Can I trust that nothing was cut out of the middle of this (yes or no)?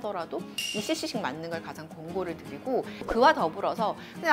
no